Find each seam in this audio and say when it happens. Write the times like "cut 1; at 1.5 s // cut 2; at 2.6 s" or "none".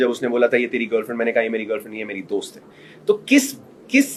none

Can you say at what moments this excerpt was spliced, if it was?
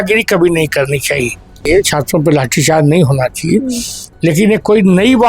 cut 1; at 1.7 s

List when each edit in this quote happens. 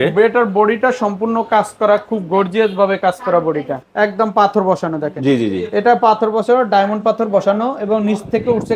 cut 1; at 3.8 s

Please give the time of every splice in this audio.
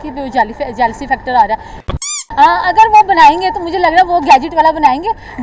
cut 1; at 2.2 s

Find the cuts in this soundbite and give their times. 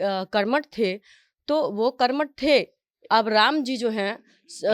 cut 1; at 2.9 s

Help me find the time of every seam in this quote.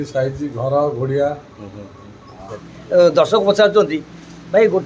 cut 1; at 2.7 s

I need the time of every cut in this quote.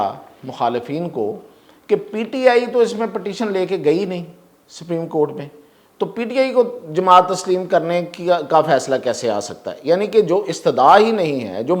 none

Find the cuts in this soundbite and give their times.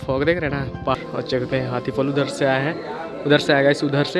cut 1; at 1.0 s

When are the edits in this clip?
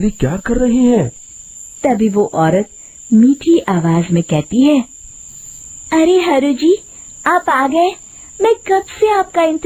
none

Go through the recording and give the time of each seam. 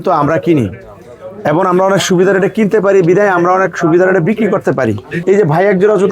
cut 1; at 5.1 s

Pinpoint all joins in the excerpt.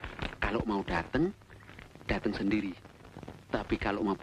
none

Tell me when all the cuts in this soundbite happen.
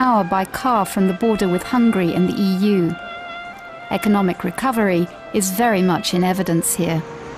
cut 1; at 2.1 s

